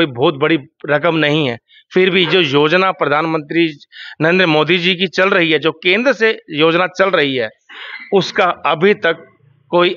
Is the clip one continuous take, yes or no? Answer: yes